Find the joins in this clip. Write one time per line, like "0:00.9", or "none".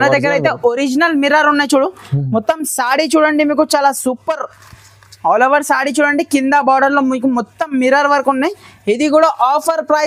none

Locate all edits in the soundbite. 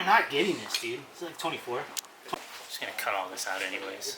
0:02.3

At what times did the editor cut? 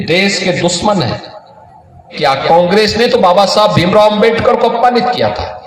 0:02.1

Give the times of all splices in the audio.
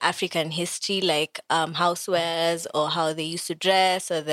none

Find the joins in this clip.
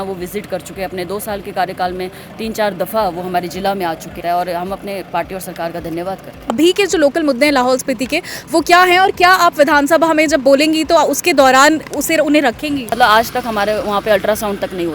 0:04.2
0:06.5
0:12.9

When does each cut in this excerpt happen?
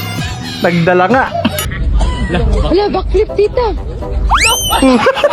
0:01.7

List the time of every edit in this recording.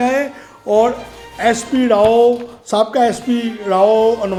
none

